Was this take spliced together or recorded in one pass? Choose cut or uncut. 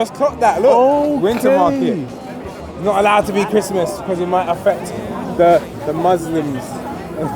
uncut